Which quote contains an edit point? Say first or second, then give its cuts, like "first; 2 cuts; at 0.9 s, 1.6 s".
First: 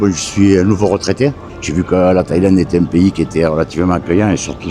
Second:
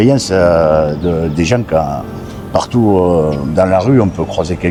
first; 1 cut; at 1.5 s